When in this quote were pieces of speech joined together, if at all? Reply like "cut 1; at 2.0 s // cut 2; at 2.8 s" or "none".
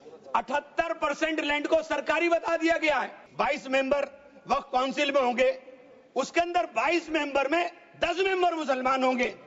cut 1; at 3.2 s